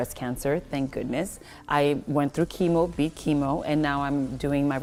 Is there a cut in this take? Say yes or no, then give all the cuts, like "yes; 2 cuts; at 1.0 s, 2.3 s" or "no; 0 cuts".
no; 0 cuts